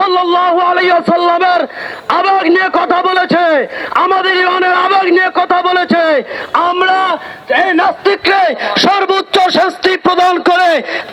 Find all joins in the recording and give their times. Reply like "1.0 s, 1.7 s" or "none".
none